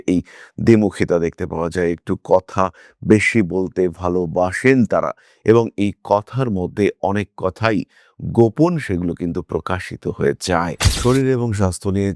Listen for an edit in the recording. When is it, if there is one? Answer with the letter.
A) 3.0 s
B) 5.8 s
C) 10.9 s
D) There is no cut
C